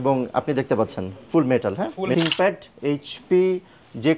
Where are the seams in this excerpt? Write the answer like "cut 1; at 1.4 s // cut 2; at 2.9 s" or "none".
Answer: cut 1; at 2.1 s